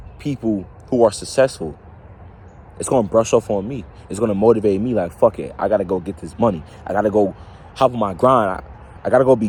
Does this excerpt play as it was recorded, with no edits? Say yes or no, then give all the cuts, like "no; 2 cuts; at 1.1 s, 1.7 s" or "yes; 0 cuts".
yes; 0 cuts